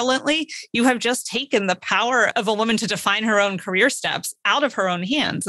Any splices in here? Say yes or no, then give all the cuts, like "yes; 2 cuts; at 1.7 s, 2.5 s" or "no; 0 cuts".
yes; 1 cut; at 2.3 s